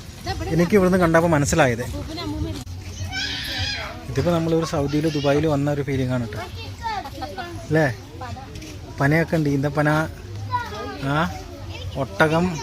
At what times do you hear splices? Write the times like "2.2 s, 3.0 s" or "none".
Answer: 2.7 s